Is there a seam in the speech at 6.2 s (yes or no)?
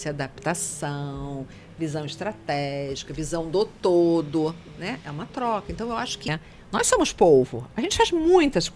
yes